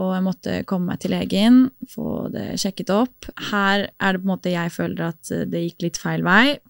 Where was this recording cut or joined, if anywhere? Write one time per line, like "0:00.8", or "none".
0:03.5

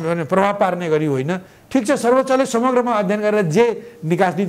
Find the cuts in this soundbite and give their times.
none

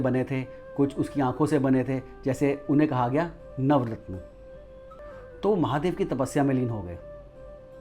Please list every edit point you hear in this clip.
0:05.0

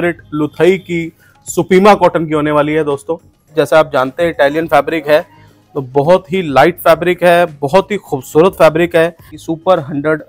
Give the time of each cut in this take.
0:03.5
0:09.3

